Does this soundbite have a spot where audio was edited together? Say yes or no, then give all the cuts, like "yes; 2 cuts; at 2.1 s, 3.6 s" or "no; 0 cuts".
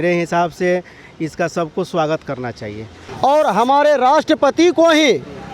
yes; 1 cut; at 2.9 s